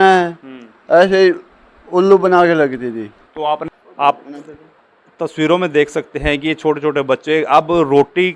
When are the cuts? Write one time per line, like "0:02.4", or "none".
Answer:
0:03.6